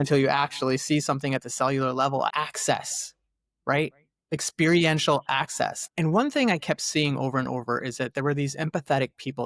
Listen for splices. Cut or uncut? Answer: cut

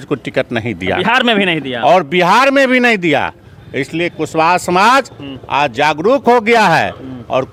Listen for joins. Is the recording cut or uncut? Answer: uncut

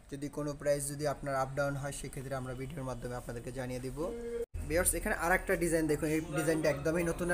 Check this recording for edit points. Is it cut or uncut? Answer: cut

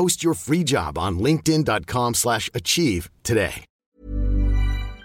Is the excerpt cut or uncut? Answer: cut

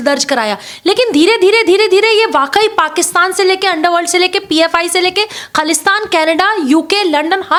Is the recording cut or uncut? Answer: uncut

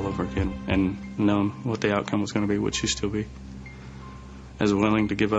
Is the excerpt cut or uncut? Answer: cut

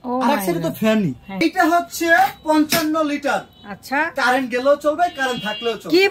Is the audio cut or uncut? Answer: cut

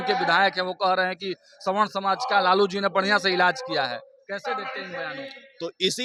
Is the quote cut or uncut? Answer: uncut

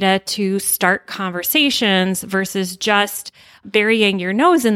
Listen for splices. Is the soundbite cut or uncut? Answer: uncut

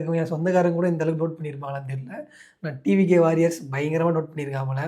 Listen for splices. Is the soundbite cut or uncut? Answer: uncut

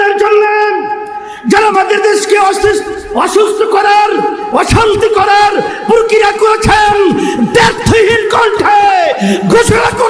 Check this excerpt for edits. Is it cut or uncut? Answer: uncut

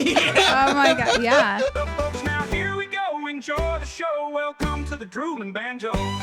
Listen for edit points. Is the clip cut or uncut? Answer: cut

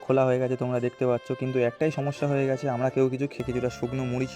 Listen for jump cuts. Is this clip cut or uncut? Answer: cut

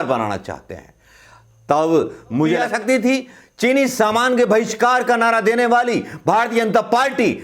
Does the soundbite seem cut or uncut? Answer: cut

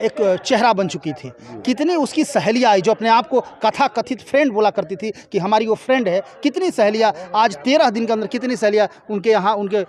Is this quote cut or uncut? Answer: uncut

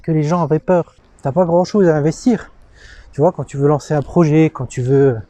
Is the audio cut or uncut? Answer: cut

